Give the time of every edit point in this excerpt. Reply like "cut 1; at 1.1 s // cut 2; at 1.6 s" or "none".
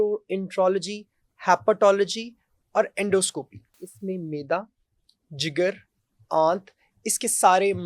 cut 1; at 3.9 s

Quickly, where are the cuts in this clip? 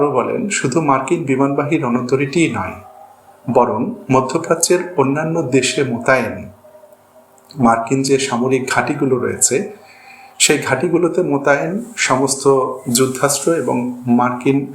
none

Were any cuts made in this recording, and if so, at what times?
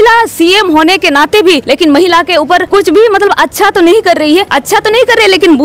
cut 1; at 1.6 s // cut 2; at 2.7 s // cut 3; at 4.5 s

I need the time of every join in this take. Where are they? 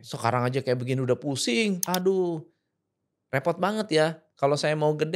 cut 1; at 1.8 s

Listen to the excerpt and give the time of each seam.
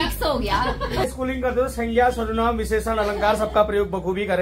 cut 1; at 1.0 s

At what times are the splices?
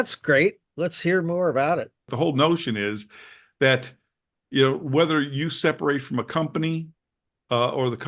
cut 1; at 2.0 s

